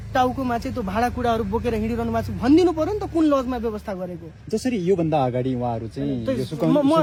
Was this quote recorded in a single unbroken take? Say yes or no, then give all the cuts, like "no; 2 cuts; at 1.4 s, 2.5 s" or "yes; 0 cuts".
yes; 0 cuts